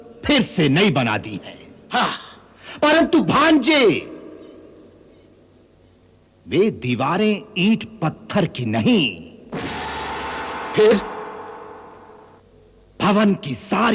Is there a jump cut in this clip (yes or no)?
no